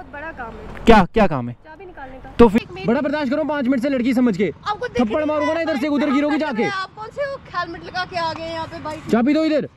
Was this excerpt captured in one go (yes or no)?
no